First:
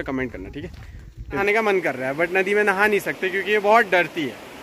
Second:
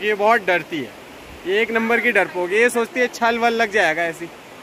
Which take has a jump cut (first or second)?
first